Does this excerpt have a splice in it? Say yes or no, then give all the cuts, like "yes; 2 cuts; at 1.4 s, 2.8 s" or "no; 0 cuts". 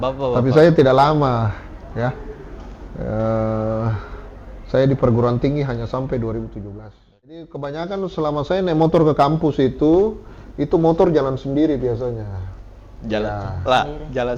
yes; 1 cut; at 7.5 s